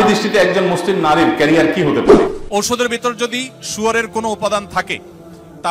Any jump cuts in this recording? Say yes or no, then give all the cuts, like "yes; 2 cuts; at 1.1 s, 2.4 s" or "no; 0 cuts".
yes; 1 cut; at 2.0 s